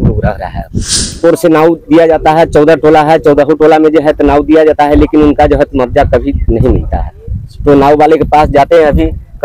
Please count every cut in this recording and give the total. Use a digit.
1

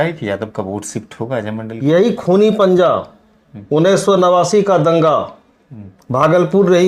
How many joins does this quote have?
1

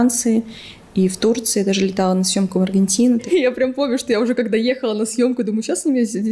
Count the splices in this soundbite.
1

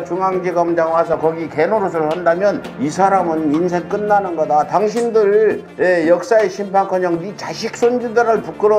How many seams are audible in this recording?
0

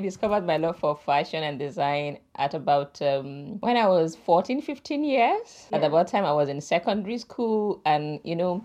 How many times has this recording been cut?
0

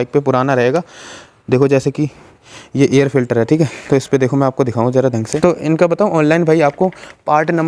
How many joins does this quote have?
1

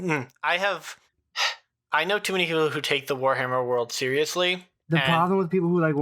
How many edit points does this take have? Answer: 1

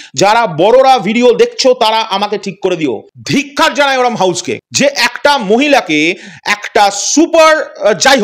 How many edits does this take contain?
1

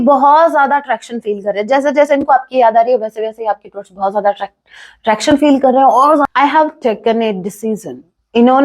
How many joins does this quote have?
1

